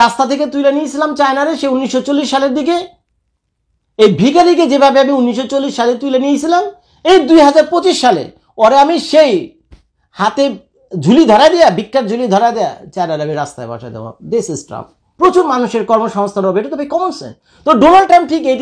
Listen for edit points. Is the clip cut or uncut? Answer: cut